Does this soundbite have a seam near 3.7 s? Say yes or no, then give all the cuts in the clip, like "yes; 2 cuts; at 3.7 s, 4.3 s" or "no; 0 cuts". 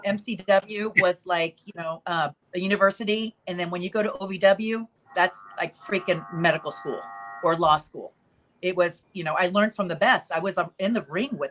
no; 3 cuts; at 2.4 s, 5.0 s, 9.1 s